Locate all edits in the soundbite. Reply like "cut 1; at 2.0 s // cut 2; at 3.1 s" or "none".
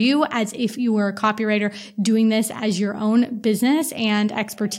none

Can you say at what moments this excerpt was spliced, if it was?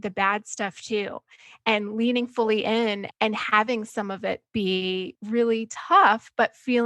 cut 1; at 3.0 s // cut 2; at 5.2 s

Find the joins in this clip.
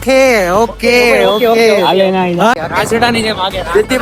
cut 1; at 2.5 s

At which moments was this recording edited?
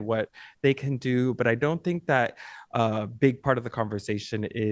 none

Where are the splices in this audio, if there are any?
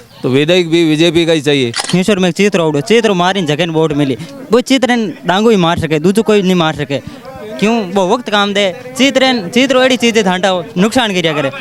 cut 1; at 1.9 s

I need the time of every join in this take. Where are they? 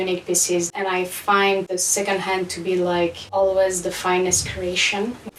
none

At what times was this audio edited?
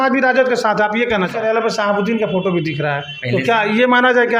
cut 1; at 1.3 s

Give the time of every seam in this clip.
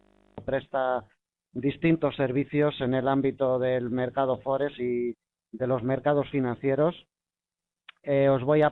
none

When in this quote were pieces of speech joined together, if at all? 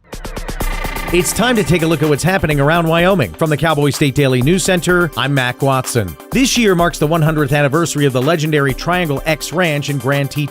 cut 1; at 1.0 s

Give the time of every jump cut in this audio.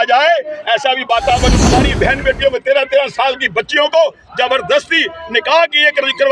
cut 1; at 1.6 s

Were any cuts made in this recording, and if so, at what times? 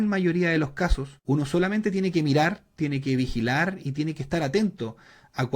cut 1; at 1.1 s

